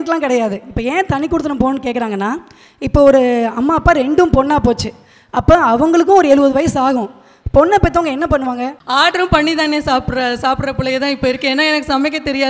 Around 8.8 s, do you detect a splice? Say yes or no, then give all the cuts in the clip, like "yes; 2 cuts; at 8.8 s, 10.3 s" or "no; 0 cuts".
yes; 1 cut; at 8.8 s